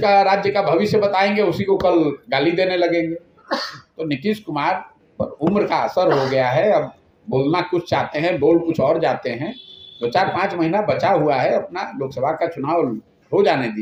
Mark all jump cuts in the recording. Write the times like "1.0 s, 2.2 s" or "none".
none